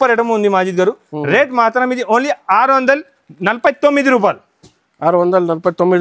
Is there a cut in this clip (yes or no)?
no